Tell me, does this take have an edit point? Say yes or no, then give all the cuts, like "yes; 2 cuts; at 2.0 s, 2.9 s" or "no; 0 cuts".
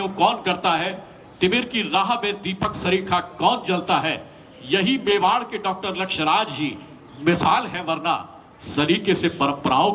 no; 0 cuts